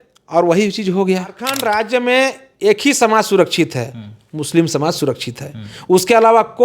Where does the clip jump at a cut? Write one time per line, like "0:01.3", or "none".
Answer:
0:01.5